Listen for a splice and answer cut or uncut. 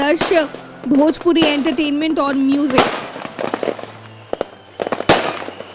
cut